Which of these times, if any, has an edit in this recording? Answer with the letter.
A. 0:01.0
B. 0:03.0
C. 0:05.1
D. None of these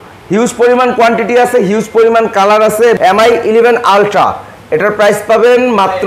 B